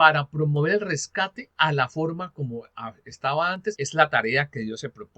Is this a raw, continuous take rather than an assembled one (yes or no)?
no